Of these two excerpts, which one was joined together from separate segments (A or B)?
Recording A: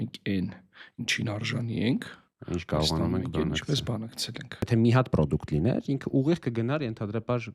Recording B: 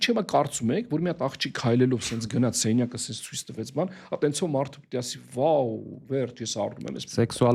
A